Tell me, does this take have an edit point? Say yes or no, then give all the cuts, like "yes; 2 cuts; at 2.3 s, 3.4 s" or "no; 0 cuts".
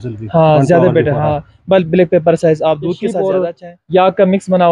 yes; 1 cut; at 3.2 s